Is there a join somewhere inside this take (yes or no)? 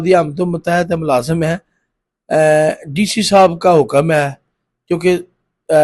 no